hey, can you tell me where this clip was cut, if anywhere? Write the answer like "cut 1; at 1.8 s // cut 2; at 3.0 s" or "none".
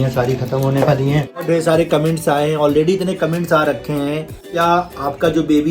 cut 1; at 1.4 s // cut 2; at 4.5 s